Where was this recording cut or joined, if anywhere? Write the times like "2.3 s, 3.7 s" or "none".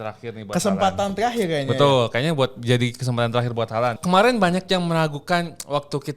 4.0 s